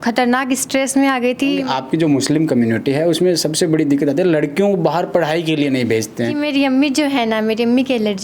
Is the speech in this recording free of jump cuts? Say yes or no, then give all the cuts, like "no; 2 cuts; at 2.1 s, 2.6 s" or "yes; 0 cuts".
no; 2 cuts; at 1.6 s, 6.4 s